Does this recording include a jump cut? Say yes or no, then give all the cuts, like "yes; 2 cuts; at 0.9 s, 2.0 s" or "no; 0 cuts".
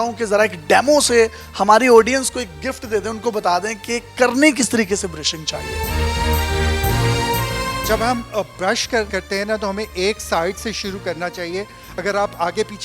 no; 0 cuts